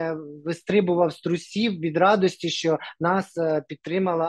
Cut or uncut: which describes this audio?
uncut